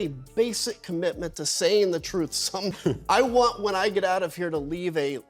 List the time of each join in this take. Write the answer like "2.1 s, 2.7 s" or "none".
2.7 s